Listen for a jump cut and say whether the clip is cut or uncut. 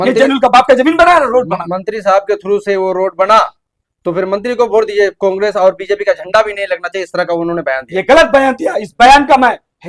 uncut